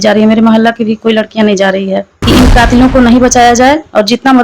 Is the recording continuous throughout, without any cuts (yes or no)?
no